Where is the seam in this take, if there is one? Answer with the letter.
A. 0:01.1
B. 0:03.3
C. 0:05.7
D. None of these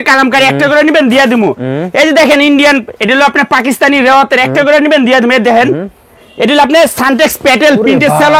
D